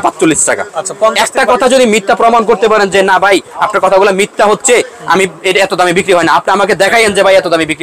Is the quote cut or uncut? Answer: uncut